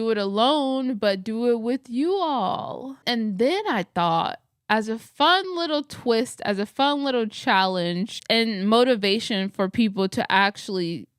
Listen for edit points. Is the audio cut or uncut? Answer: cut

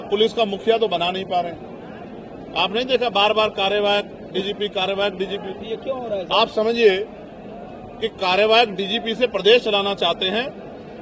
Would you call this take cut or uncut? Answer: uncut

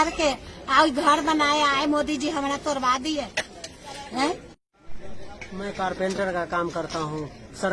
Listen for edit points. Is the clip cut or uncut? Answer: uncut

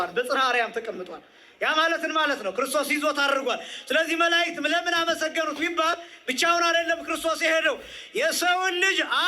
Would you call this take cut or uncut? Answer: uncut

